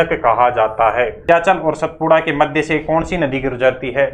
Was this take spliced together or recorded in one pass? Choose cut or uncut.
cut